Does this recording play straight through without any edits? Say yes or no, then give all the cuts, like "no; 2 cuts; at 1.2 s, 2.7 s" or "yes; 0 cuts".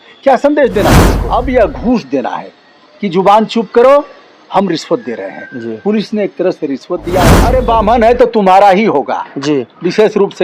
no; 2 cuts; at 1.1 s, 7.5 s